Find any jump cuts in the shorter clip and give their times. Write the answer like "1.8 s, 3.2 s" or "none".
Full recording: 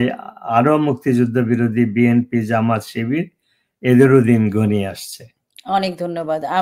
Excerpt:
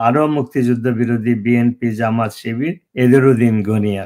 2.8 s